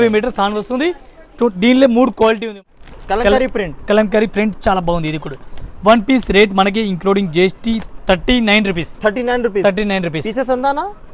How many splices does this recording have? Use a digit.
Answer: 1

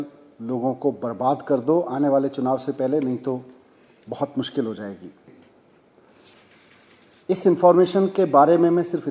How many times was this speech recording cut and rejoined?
1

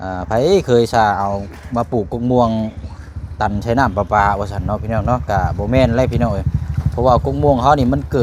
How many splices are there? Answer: 0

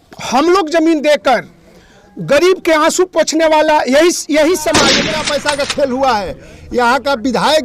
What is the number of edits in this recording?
1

